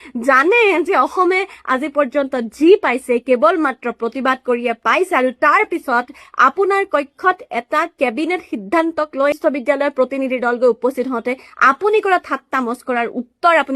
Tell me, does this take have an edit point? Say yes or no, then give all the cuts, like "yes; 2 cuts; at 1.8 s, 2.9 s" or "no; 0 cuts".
no; 0 cuts